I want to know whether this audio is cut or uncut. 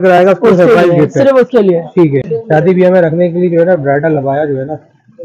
cut